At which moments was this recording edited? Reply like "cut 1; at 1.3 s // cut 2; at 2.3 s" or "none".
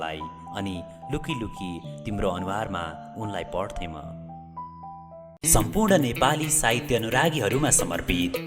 cut 1; at 5.3 s